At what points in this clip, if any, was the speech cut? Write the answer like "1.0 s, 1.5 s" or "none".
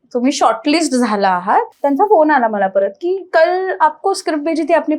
1.7 s